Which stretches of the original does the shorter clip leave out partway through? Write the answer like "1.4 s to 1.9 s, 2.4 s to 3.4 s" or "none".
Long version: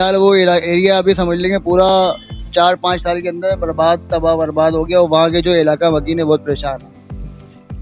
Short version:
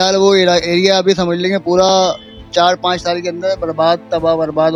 none